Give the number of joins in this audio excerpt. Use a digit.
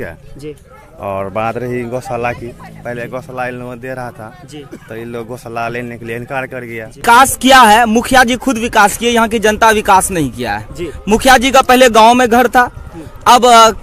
1